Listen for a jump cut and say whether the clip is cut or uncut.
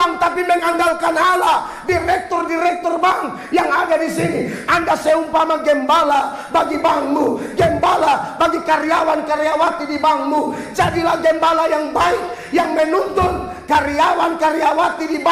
uncut